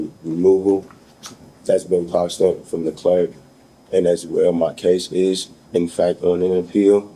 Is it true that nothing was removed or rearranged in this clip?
yes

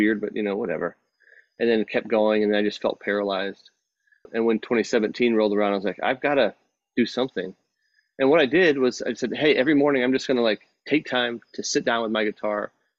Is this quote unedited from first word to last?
no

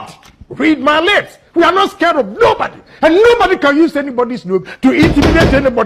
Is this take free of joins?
yes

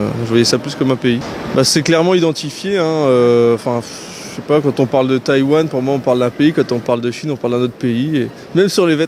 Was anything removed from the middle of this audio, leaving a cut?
no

